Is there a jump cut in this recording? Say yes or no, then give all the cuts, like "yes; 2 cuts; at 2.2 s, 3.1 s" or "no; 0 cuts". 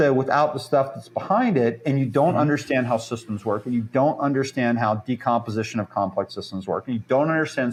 no; 0 cuts